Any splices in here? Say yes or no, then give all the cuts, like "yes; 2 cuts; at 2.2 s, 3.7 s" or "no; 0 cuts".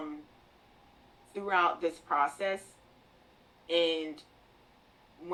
no; 0 cuts